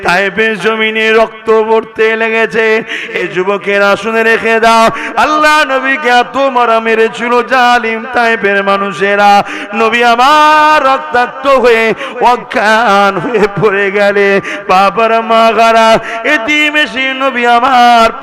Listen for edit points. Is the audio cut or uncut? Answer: cut